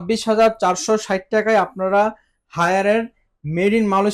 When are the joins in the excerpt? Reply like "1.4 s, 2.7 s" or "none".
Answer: none